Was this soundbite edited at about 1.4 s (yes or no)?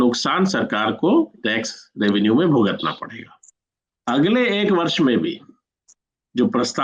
no